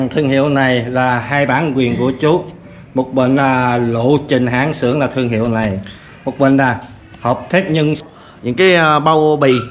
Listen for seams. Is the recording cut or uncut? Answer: cut